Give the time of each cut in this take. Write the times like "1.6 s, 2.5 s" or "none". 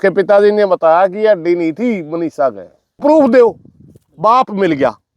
3.0 s